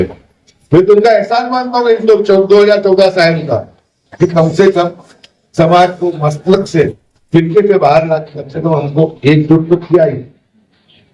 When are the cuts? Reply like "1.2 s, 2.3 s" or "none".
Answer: none